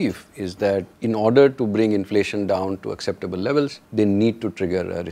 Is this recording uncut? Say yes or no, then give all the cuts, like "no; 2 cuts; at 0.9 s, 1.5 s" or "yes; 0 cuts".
no; 2 cuts; at 0.9 s, 3.8 s